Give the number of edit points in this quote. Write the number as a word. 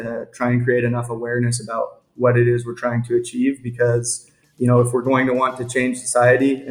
zero